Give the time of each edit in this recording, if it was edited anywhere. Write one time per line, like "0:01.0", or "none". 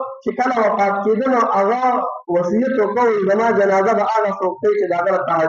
none

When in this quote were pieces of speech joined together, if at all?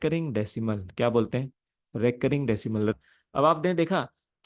0:02.9

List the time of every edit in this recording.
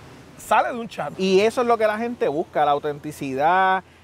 0:01.0

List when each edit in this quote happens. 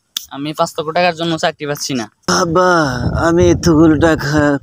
0:02.2

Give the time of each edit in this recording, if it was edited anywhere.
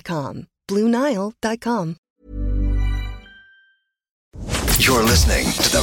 0:02.0
0:04.4

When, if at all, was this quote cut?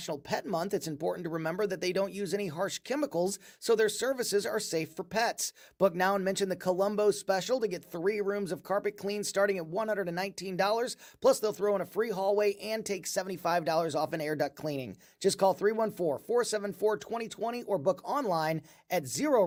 none

